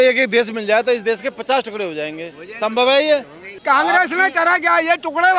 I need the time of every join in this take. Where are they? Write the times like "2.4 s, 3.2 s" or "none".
3.5 s